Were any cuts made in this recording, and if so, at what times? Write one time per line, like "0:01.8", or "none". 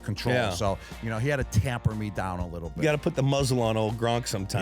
0:02.7

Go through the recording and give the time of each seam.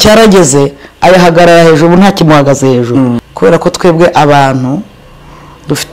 0:03.2

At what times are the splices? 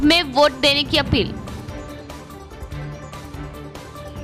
none

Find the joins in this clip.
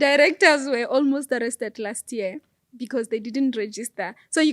none

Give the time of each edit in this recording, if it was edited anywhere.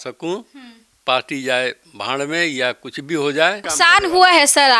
0:03.7

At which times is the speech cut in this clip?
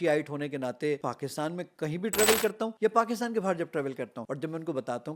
0:01.0
0:02.7
0:04.2

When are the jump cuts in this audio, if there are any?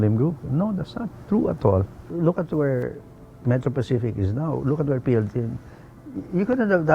0:01.9

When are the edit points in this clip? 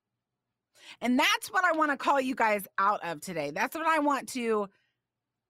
none

